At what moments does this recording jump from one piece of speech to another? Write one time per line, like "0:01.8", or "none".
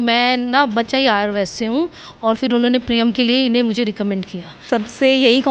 0:04.6